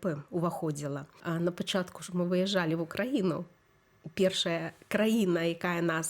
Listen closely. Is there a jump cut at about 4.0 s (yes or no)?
no